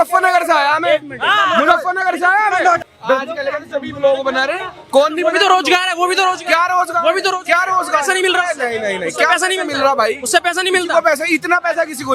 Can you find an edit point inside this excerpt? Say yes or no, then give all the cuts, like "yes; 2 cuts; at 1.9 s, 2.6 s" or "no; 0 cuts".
yes; 1 cut; at 2.9 s